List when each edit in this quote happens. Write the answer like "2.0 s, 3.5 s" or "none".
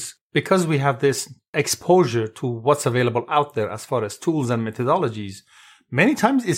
1.5 s